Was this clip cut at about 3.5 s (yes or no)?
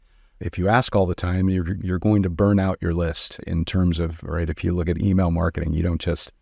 no